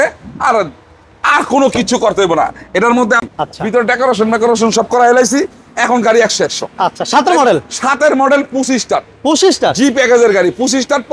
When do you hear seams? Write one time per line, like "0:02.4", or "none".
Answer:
0:03.2

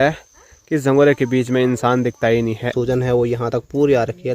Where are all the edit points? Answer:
0:02.7

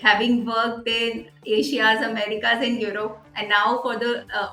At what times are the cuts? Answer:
none

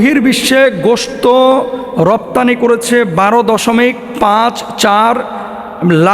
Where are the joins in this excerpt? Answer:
none

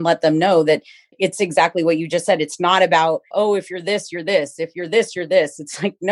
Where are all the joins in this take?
0:01.1
0:03.3

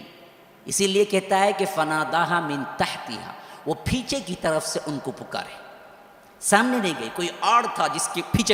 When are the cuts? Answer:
none

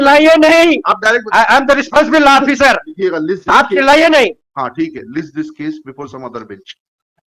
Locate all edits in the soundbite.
none

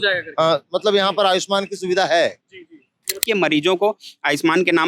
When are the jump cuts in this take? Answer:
0:03.2

